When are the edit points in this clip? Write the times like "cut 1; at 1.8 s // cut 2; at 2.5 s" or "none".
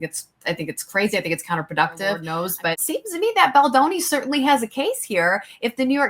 cut 1; at 2.3 s

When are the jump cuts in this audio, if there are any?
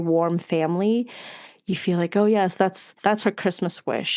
cut 1; at 2.9 s

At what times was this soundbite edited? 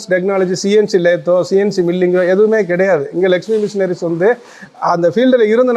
cut 1; at 4.6 s

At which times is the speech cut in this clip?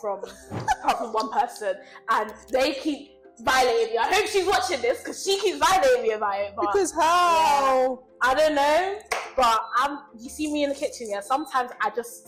none

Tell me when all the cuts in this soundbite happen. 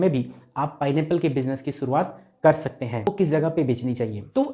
cut 1; at 3.1 s

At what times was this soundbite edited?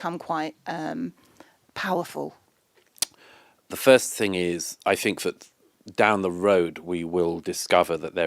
cut 1; at 2.4 s

